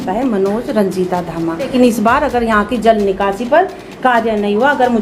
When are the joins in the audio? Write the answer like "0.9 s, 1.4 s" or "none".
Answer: 1.7 s